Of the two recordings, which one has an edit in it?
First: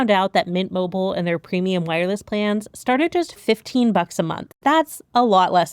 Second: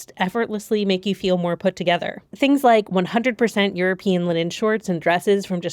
first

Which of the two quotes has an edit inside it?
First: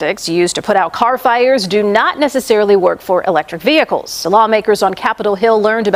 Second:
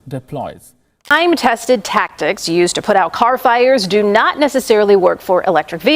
second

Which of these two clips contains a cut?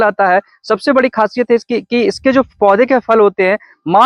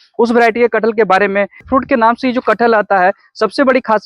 second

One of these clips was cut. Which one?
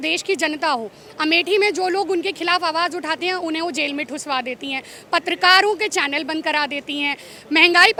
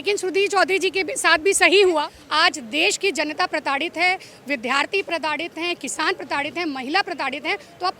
second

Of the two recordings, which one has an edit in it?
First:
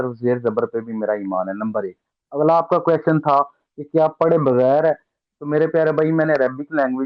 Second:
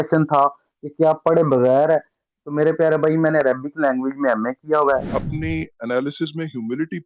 second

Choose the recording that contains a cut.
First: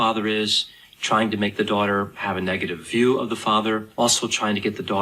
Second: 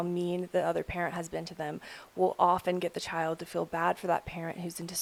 first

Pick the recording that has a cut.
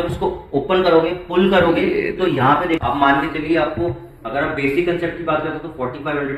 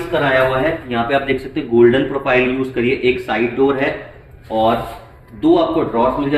first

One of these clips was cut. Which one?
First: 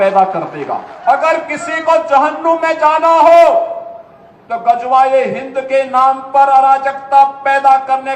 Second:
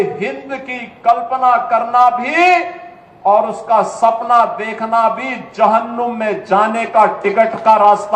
first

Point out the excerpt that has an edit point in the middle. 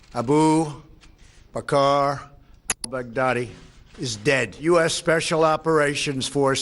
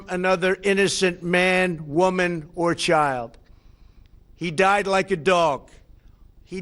first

